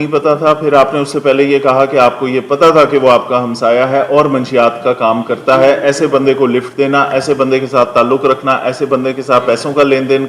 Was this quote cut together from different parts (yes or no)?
no